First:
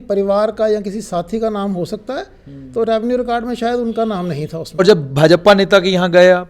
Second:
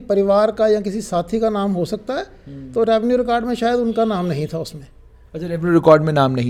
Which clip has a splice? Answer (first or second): first